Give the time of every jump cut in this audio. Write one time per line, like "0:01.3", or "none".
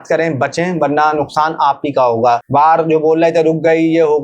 0:02.4